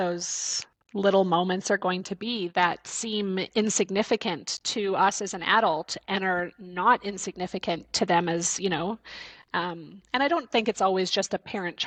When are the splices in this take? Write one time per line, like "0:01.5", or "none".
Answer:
none